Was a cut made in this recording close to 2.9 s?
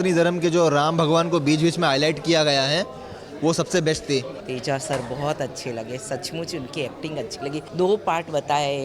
no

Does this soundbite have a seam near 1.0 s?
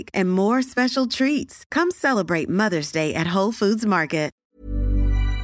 no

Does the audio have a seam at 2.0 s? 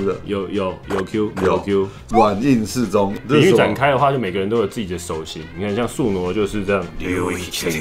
yes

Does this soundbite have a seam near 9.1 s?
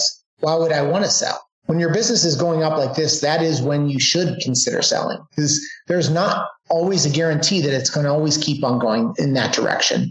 yes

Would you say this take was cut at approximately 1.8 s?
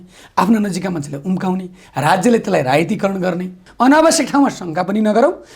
no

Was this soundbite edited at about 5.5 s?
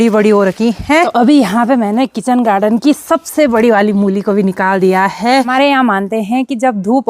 yes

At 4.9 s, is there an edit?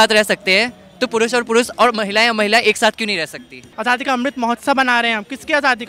no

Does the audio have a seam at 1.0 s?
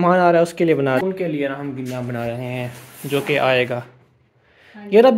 yes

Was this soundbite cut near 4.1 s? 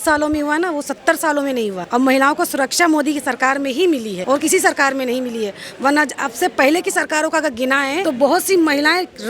yes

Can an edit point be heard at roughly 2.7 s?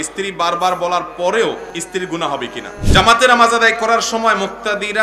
yes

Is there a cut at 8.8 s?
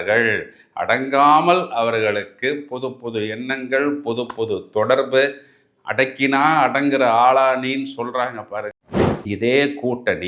yes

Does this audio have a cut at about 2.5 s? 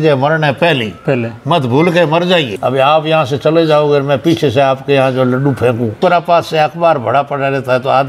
yes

